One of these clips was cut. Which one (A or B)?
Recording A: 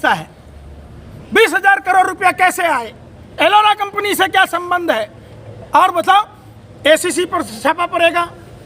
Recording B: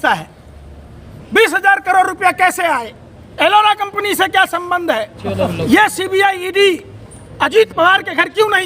B